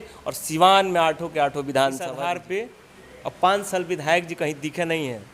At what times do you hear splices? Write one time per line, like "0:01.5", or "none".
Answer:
0:02.1